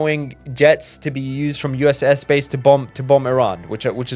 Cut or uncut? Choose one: uncut